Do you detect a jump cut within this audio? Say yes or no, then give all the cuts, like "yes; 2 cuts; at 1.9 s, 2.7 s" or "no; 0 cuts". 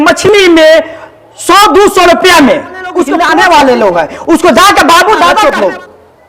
yes; 2 cuts; at 3.2 s, 5.4 s